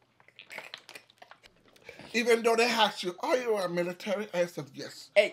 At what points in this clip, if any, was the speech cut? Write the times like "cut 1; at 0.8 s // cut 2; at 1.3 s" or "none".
cut 1; at 1.5 s